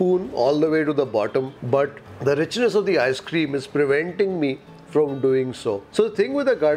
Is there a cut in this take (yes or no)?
no